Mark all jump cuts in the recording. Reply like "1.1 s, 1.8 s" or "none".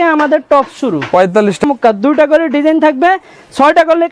1.6 s